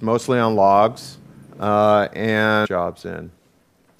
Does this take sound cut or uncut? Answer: uncut